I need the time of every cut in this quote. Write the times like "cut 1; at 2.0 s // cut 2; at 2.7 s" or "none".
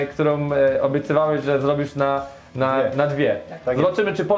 none